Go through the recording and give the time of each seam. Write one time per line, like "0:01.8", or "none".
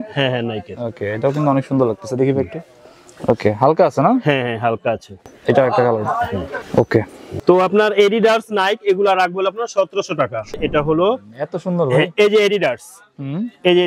0:05.3
0:06.6
0:07.2
0:10.5